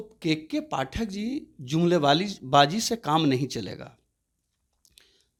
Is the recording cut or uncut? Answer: uncut